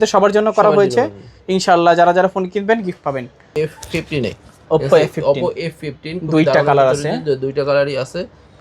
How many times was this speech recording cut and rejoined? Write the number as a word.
one